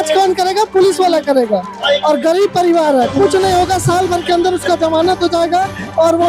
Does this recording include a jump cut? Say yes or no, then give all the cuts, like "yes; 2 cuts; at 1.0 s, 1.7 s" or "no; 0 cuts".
no; 0 cuts